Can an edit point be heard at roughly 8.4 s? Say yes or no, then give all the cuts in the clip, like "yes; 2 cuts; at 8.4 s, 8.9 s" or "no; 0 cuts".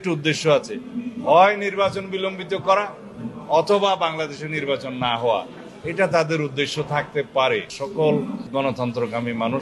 yes; 2 cuts; at 7.8 s, 8.4 s